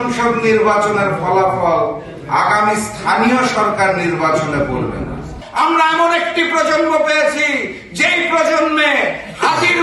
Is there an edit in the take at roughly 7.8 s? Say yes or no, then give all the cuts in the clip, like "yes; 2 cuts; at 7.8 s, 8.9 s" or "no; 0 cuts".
no; 1 cut; at 5.4 s